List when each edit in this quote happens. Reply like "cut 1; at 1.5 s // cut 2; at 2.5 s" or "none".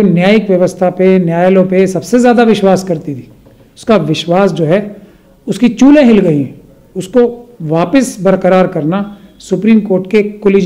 none

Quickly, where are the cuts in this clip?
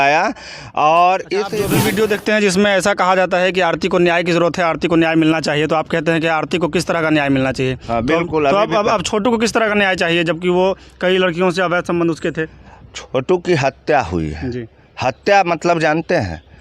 cut 1; at 1.6 s

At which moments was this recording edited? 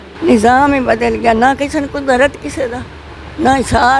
none

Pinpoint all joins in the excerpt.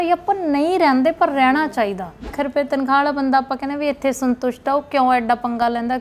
cut 1; at 2.3 s

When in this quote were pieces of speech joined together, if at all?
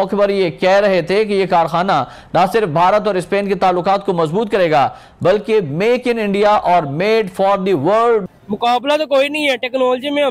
cut 1; at 8.3 s

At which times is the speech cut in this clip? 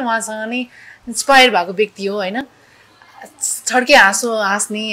none

